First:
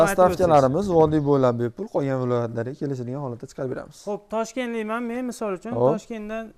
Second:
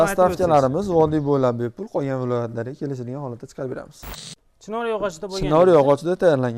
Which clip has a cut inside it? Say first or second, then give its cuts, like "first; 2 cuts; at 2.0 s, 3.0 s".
second; 1 cut; at 3.9 s